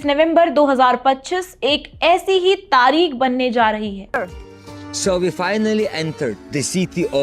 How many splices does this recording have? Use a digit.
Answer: 1